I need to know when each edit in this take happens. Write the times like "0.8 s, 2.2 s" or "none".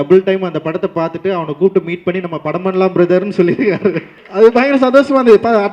4.2 s